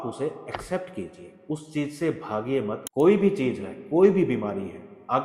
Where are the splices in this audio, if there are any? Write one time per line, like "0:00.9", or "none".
0:02.8

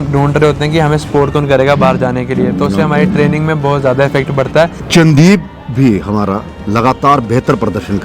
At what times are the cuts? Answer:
0:04.8

